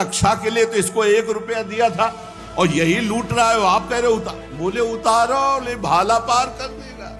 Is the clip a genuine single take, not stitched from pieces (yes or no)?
yes